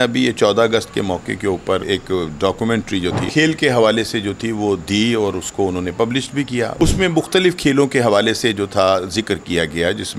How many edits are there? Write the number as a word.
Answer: three